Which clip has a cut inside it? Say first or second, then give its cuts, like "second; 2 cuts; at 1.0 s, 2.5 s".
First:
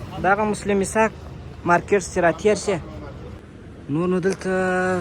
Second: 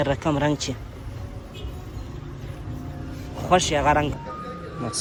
first; 1 cut; at 3.4 s